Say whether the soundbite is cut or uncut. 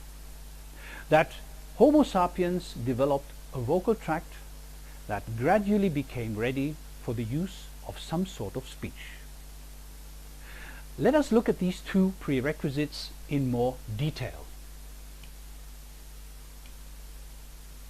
uncut